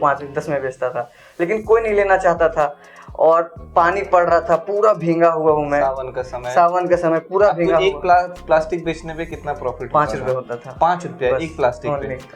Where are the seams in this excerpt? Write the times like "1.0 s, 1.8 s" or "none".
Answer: none